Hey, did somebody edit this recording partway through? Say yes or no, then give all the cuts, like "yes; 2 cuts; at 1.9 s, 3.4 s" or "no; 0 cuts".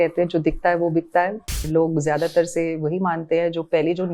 yes; 1 cut; at 1.6 s